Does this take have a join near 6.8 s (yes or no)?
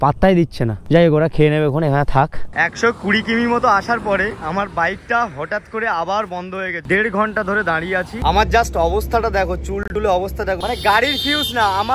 yes